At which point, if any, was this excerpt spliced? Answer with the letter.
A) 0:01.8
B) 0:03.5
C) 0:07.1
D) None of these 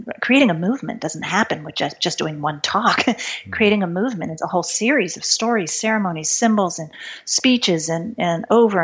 D